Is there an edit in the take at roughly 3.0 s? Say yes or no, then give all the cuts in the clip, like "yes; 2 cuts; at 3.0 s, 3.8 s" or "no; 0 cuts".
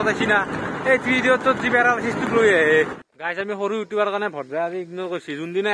yes; 1 cut; at 3.0 s